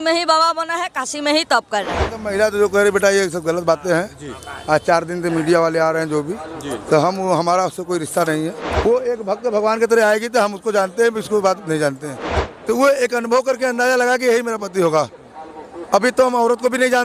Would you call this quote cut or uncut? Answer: cut